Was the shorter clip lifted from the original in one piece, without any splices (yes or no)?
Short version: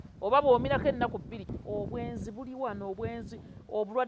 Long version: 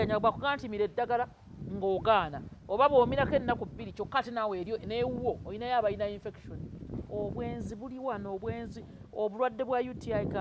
no